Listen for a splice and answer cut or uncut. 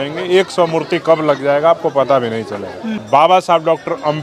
uncut